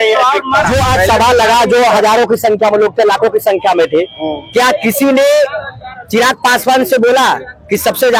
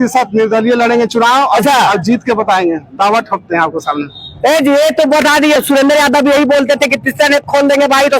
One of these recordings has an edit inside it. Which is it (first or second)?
second